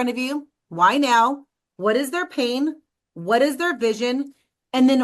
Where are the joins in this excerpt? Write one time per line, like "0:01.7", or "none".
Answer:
none

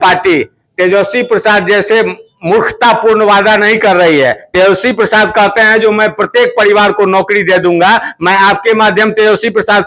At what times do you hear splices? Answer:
none

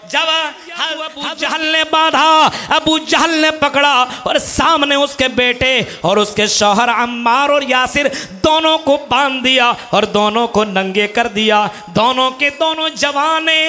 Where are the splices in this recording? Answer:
0:01.2

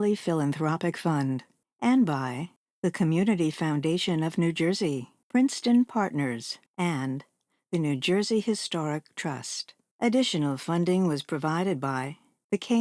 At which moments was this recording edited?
0:05.1

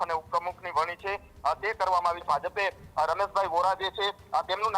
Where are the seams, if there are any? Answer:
0:02.2

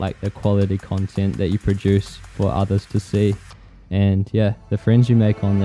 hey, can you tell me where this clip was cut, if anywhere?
none

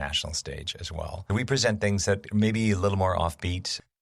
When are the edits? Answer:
0:01.2

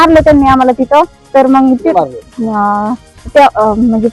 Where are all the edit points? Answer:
none

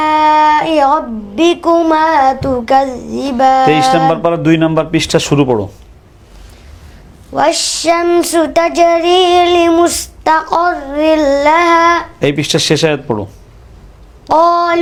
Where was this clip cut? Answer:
none

